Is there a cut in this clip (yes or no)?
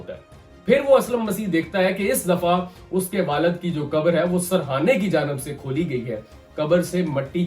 yes